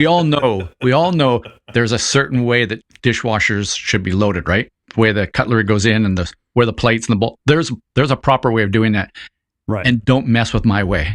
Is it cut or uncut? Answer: cut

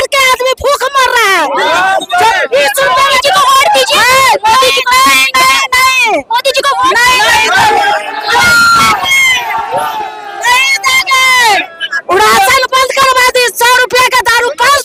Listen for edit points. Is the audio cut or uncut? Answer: uncut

